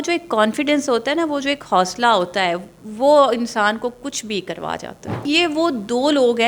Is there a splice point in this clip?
yes; 1 cut; at 5.2 s

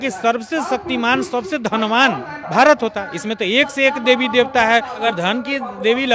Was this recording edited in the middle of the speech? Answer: yes; 2 cuts; at 2.3 s, 5.0 s

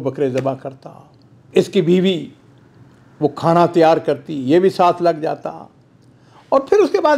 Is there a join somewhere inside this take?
no; 0 cuts

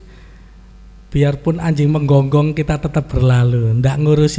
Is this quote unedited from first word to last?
yes; 0 cuts

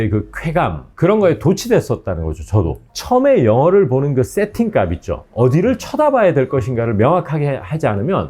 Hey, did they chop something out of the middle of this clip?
yes; 1 cut; at 2.8 s

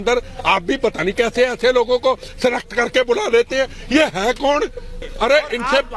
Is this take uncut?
no; 1 cut; at 5.0 s

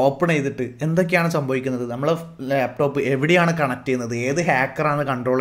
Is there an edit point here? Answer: no; 0 cuts

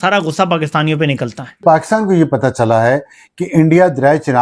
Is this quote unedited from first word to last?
no; 1 cut; at 1.6 s

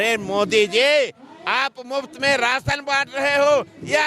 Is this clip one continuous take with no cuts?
yes; 0 cuts

